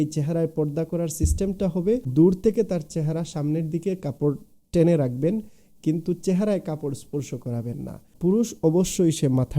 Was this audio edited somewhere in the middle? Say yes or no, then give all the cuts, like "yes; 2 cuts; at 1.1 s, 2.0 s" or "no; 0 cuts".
yes; 2 cuts; at 2.1 s, 8.1 s